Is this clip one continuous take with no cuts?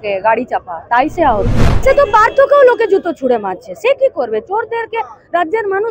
no; 1 cut; at 1.6 s

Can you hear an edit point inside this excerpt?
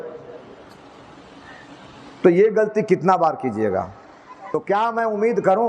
yes; 1 cut; at 4.5 s

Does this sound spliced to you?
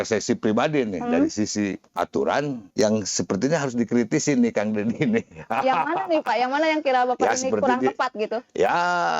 yes; 2 cuts; at 1.8 s, 2.6 s

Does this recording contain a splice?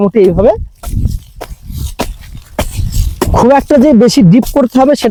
no; 0 cuts

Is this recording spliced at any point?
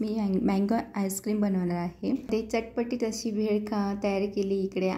yes; 1 cut; at 2.3 s

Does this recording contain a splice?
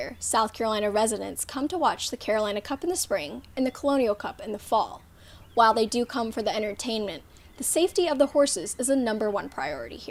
no; 0 cuts

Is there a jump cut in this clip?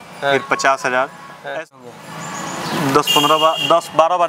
yes; 1 cut; at 1.7 s

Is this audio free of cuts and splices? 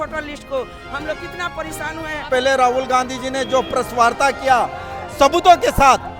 no; 1 cut; at 2.3 s

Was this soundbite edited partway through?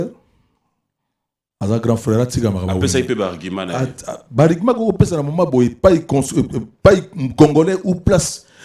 no; 0 cuts

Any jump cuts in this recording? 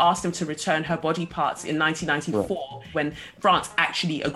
yes; 1 cut; at 2.9 s

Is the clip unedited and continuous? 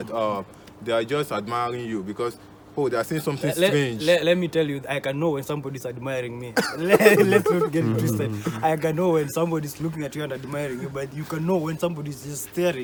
yes; 0 cuts

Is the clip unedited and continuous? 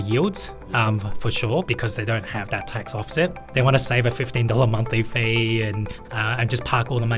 no; 3 cuts; at 1.7 s, 3.4 s, 6.0 s

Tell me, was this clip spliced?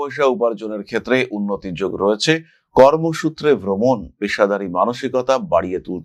no; 0 cuts

